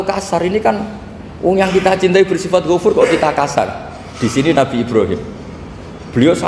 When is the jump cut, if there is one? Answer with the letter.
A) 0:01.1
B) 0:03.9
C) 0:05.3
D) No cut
D